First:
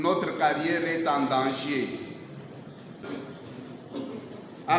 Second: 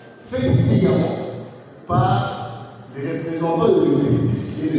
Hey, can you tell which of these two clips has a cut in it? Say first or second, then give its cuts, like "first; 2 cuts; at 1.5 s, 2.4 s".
first; 1 cut; at 3.0 s